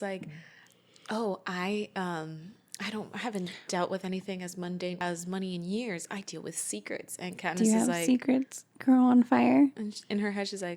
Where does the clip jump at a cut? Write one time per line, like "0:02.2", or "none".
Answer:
0:05.0